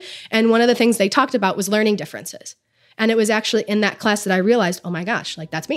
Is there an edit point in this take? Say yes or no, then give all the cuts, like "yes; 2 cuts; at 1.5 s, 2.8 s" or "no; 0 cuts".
no; 0 cuts